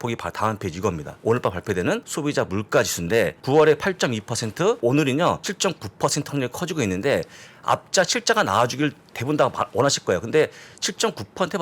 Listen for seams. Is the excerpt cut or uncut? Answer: cut